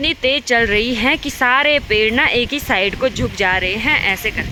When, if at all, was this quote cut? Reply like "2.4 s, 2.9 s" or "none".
none